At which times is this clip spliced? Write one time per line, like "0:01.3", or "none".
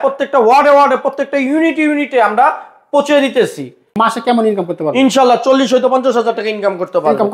0:04.0